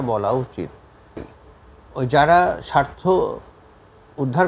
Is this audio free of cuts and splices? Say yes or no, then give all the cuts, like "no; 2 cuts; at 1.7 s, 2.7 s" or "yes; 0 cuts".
no; 1 cut; at 1.3 s